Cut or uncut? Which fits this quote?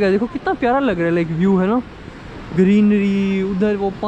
uncut